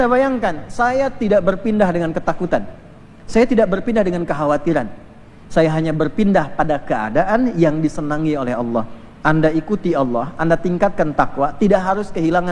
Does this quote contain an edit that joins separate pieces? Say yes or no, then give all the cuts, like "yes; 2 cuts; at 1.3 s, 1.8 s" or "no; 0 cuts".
no; 0 cuts